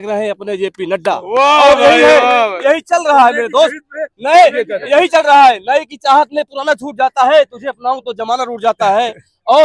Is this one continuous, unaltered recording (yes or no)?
yes